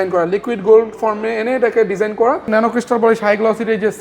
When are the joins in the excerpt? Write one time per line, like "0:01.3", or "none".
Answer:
0:02.5